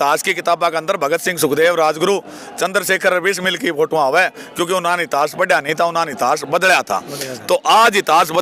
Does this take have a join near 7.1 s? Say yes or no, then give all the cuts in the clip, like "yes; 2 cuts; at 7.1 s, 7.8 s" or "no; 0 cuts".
no; 0 cuts